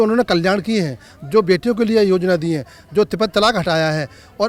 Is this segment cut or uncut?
uncut